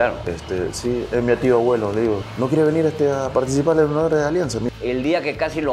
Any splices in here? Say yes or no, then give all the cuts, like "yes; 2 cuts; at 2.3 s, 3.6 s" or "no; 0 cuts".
yes; 2 cuts; at 2.3 s, 4.6 s